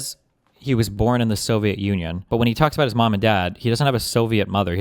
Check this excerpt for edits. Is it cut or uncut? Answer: cut